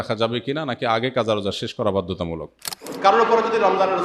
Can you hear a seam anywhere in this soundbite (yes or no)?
yes